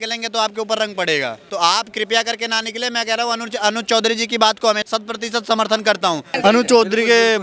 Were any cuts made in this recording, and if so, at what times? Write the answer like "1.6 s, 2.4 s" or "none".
1.4 s, 4.8 s, 6.4 s